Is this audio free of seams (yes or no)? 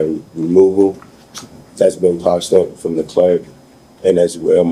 yes